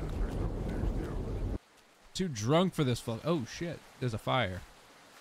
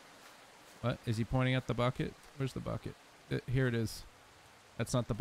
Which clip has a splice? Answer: first; 1 cut; at 1.6 s

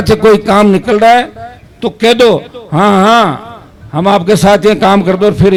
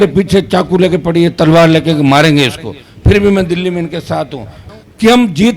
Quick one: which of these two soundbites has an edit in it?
second; 1 cut; at 4.6 s

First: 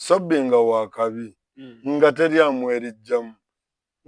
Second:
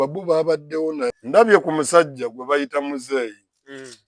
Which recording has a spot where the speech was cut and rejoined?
second; 1 cut; at 1.2 s

